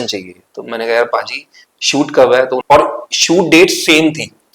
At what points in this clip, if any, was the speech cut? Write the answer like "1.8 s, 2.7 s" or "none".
2.6 s

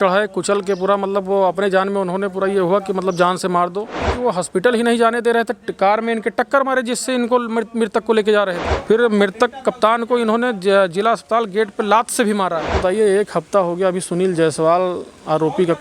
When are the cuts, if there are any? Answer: 4.1 s, 8.7 s, 12.8 s

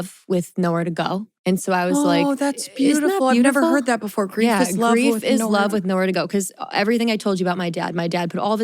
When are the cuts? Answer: 1.3 s

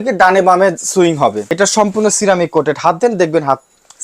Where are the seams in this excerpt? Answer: 1.4 s

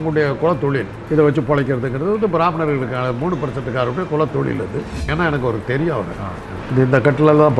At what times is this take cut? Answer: 1.0 s, 5.0 s, 6.5 s

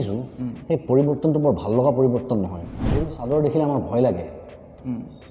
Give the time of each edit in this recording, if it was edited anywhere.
3.0 s

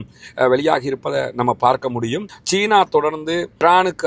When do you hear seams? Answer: 2.3 s

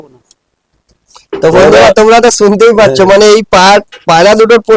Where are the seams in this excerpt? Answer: none

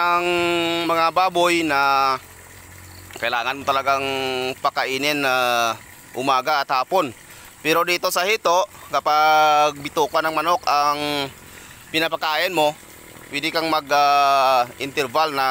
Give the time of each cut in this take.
none

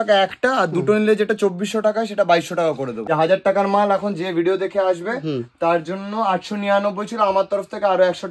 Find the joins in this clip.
3.0 s

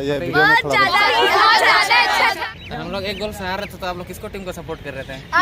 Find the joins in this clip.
2.4 s

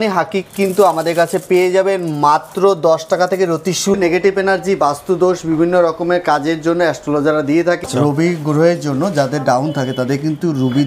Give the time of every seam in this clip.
4.0 s, 7.8 s

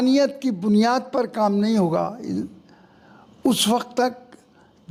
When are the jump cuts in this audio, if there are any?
none

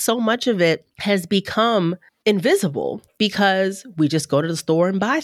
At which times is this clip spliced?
0.9 s, 2.1 s, 3.0 s

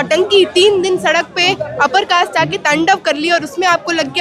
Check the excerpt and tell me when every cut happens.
none

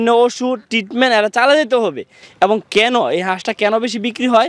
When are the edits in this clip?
2.2 s

